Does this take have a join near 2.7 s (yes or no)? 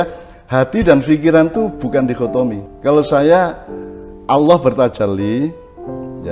yes